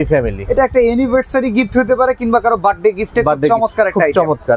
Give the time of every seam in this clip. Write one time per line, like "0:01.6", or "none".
none

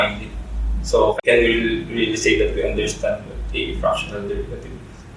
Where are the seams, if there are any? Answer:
0:01.2

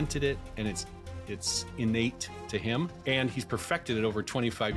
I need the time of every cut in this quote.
0:03.0

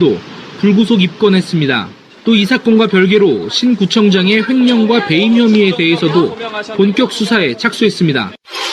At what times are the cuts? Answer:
0:03.4

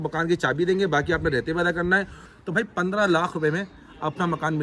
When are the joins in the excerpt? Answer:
0:02.2

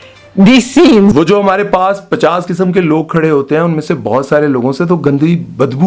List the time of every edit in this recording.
none

